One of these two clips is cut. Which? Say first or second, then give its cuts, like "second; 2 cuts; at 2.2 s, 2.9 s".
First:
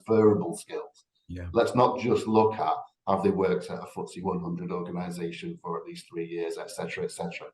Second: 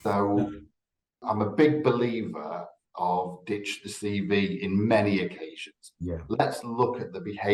second; 1 cut; at 1.2 s